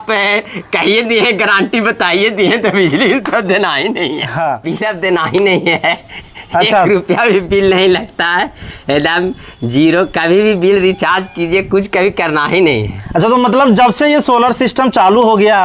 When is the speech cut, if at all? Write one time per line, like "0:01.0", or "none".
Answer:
0:04.6